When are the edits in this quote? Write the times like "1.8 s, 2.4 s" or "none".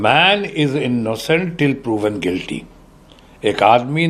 none